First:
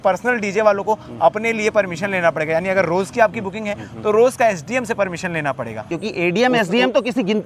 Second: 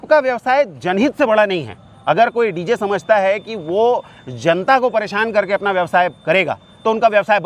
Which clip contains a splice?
first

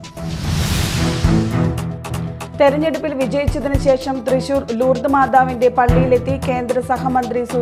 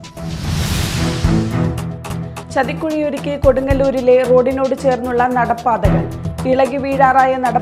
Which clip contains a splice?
second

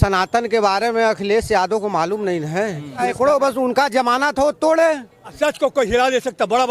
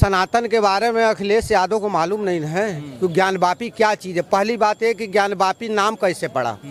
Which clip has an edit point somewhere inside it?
first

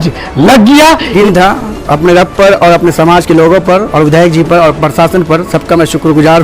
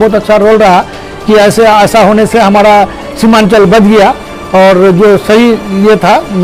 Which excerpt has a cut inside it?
first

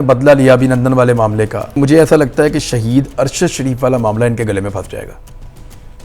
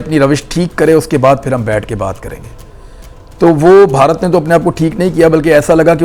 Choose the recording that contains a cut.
first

